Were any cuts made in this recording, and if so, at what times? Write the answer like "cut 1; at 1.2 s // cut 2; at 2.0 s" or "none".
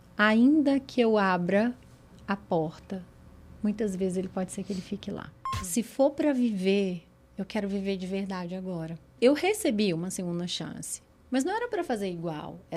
cut 1; at 5.4 s // cut 2; at 9.1 s